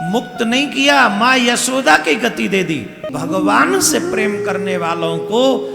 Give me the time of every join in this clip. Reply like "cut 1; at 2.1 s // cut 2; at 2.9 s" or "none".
cut 1; at 3.1 s